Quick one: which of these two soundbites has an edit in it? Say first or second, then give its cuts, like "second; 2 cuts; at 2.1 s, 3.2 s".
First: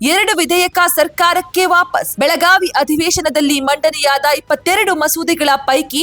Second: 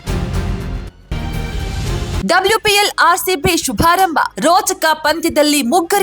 second; 1 cut; at 2.2 s